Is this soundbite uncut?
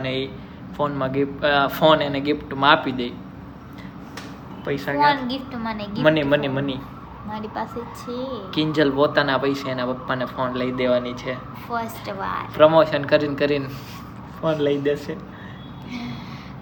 yes; 0 cuts

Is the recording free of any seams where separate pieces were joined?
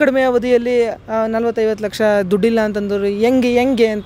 yes; 0 cuts

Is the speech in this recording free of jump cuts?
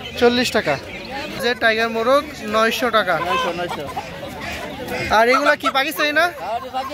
no; 1 cut; at 1.4 s

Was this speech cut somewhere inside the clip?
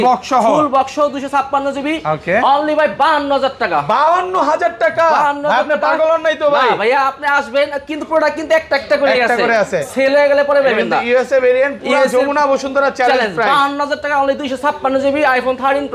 no; 0 cuts

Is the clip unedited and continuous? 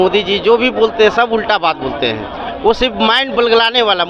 yes; 0 cuts

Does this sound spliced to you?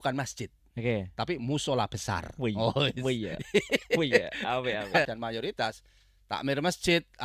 yes; 1 cut; at 5.1 s

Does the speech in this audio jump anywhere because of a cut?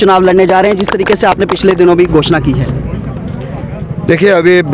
no; 0 cuts

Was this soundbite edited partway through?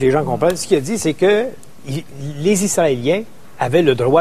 yes; 1 cut; at 2.2 s

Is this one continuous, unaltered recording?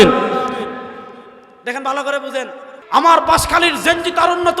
no; 1 cut; at 2.7 s

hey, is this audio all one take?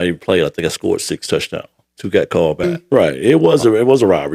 no; 1 cut; at 2.6 s

